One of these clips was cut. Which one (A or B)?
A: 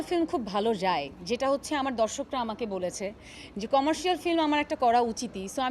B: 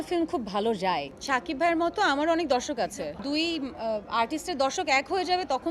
B